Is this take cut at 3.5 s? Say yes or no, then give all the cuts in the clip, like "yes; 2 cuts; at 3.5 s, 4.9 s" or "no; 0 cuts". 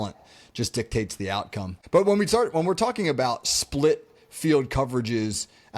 no; 1 cut; at 1.7 s